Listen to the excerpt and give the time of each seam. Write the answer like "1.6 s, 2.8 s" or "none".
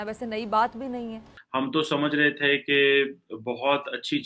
1.3 s